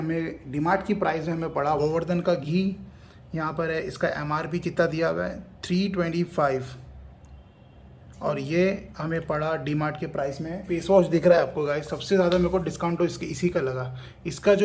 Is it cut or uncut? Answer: cut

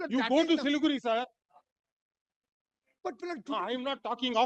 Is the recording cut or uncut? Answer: uncut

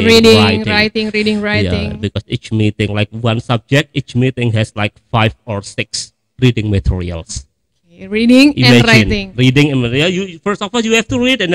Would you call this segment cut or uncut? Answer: uncut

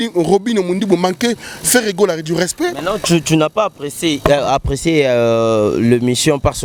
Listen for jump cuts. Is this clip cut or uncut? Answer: uncut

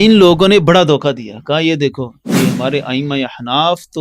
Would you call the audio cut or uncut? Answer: uncut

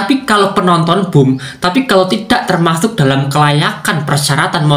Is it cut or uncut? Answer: uncut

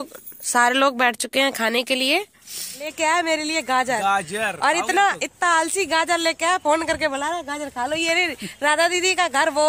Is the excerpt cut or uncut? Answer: cut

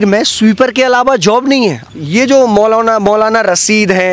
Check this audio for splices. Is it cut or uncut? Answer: cut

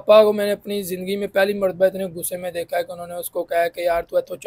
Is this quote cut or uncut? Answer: uncut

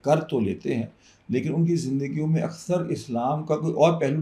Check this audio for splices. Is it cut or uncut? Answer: uncut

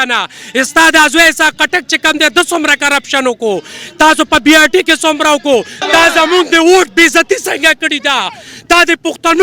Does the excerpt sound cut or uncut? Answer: cut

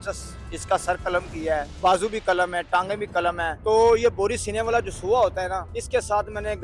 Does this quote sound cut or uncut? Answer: cut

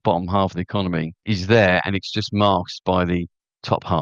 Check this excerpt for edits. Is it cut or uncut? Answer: cut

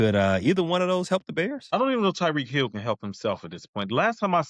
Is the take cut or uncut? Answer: cut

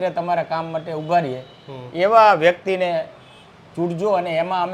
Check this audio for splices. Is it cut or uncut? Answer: uncut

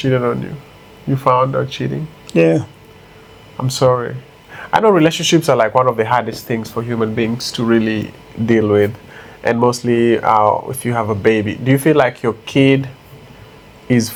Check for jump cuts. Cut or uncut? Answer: uncut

